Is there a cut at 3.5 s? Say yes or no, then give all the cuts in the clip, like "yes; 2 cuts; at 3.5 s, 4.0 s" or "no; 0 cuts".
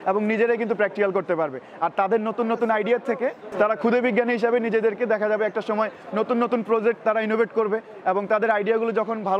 yes; 1 cut; at 3.5 s